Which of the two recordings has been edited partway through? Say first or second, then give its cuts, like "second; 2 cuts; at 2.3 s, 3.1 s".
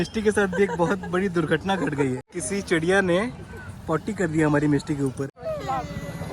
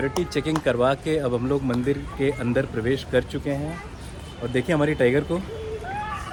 first; 2 cuts; at 2.3 s, 5.3 s